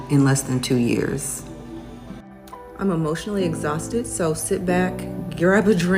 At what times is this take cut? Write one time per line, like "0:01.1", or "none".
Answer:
none